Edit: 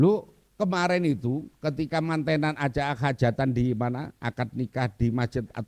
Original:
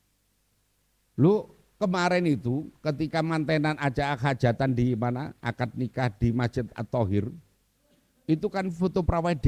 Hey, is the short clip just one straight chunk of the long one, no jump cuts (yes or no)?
yes